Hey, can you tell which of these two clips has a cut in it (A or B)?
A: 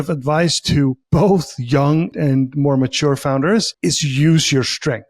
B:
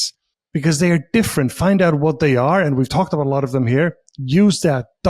A